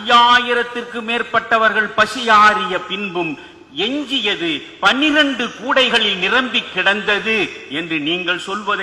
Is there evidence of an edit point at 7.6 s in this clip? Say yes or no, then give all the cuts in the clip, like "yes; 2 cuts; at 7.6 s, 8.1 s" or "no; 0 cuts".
no; 0 cuts